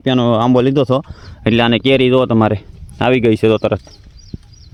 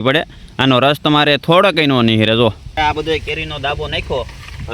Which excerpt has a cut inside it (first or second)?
second